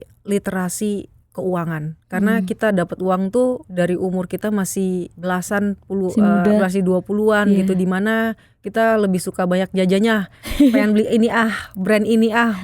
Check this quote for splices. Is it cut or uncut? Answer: cut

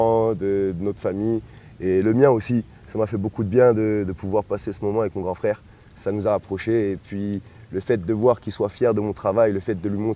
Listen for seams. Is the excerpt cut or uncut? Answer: uncut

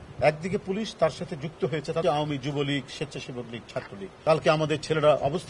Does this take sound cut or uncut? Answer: cut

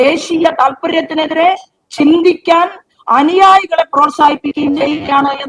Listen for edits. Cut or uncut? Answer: uncut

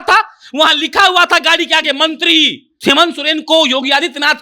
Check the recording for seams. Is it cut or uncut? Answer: cut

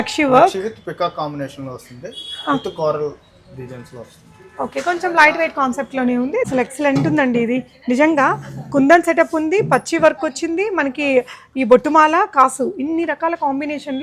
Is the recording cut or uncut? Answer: cut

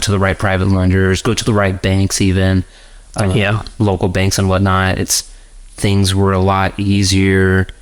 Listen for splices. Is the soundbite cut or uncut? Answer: uncut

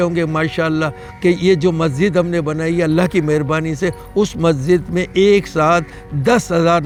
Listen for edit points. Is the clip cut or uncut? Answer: uncut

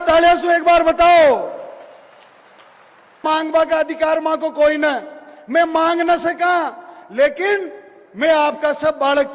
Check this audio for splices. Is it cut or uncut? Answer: cut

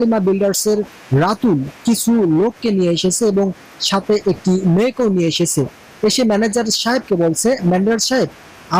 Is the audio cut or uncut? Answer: uncut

